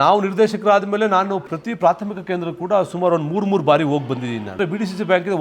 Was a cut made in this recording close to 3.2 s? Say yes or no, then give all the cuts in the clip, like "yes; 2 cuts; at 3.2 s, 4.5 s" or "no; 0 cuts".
no; 2 cuts; at 1.5 s, 4.6 s